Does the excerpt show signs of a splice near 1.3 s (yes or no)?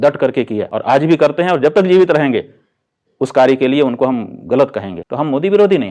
no